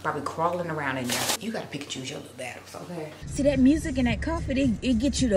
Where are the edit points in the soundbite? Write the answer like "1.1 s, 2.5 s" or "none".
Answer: 1.4 s, 3.2 s